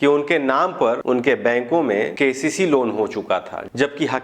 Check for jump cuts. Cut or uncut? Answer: cut